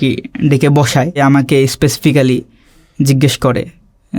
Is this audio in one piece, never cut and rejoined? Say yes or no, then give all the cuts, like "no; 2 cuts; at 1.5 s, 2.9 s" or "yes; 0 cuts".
no; 1 cut; at 1.2 s